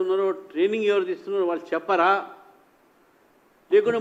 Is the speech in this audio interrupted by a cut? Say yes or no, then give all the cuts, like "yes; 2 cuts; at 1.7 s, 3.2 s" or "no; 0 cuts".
no; 0 cuts